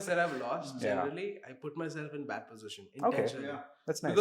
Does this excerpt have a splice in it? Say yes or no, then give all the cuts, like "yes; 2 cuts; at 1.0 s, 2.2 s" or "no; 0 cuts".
no; 0 cuts